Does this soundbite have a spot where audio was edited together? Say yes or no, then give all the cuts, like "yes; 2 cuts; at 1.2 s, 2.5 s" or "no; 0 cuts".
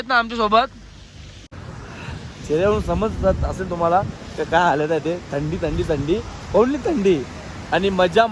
yes; 1 cut; at 1.3 s